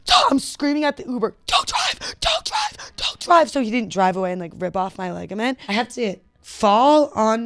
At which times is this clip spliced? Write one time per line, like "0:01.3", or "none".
0:05.6